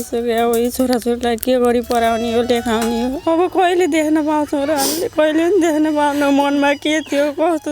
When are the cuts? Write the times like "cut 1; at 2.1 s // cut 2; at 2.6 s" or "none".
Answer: cut 1; at 3.2 s